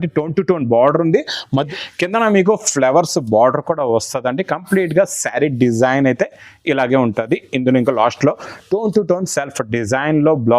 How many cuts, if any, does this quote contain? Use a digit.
1